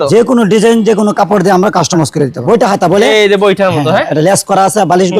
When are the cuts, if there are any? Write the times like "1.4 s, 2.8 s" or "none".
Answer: 2.4 s